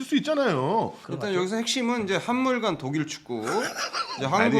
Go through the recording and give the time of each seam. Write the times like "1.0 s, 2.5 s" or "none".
1.0 s